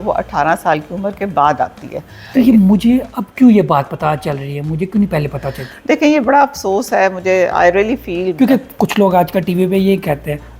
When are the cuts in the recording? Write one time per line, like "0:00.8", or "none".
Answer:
0:02.2
0:08.3